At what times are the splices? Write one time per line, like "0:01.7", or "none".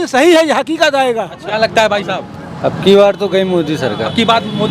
0:01.4